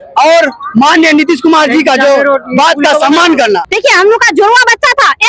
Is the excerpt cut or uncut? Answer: cut